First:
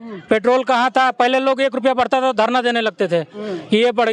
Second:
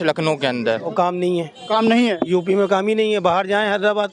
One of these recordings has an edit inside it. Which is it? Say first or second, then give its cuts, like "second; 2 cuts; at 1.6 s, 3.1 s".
second; 1 cut; at 0.9 s